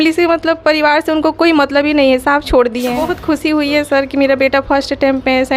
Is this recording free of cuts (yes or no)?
no